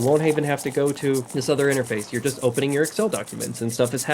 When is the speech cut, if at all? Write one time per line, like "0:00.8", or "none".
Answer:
0:01.3

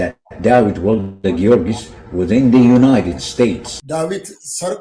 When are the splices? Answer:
0:03.7

